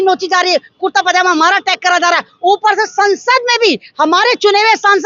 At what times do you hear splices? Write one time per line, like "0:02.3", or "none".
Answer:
none